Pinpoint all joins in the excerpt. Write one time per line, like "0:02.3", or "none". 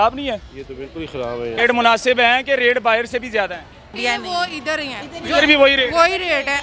0:01.6
0:03.9